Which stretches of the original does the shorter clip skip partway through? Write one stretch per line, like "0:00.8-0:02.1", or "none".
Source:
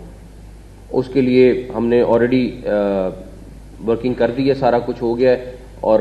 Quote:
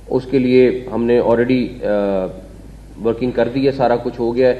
none